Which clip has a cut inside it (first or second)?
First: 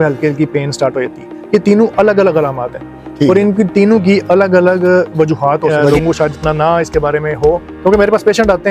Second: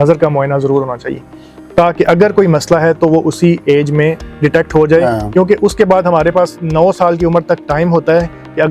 first